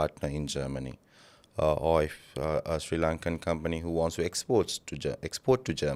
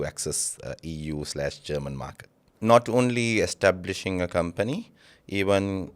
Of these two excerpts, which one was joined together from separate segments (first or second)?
second